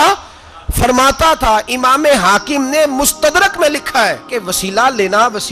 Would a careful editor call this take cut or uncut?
cut